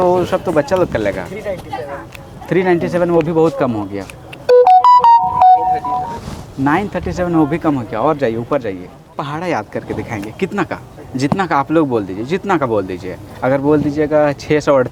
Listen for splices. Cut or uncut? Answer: cut